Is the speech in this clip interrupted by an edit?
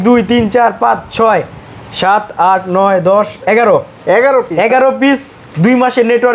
no; 0 cuts

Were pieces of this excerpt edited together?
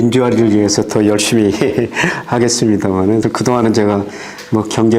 yes; 1 cut; at 3.2 s

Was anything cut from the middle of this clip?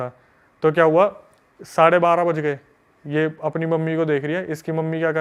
no; 0 cuts

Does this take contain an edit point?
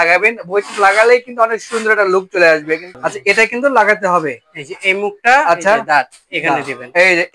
yes; 1 cut; at 2.9 s

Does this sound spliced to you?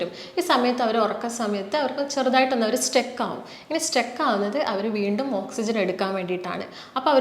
no; 0 cuts

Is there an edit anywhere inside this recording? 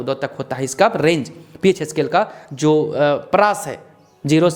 no; 0 cuts

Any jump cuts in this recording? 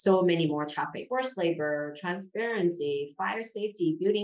yes; 1 cut; at 1.0 s

